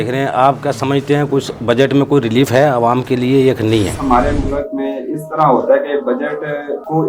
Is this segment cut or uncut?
cut